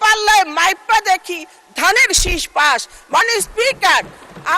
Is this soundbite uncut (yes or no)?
yes